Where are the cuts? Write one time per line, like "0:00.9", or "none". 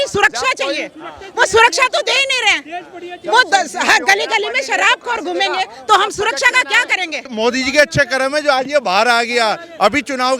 0:07.2